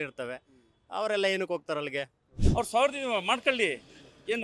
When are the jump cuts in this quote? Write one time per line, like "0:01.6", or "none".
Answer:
0:02.4